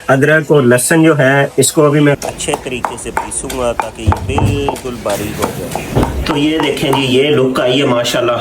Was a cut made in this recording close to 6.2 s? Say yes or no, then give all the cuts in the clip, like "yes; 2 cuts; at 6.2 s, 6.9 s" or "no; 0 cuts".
yes; 1 cut; at 6.2 s